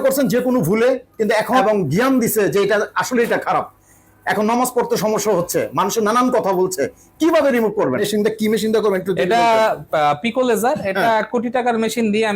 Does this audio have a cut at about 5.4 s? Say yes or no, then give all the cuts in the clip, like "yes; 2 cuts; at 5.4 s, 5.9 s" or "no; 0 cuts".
no; 2 cuts; at 1.6 s, 8.0 s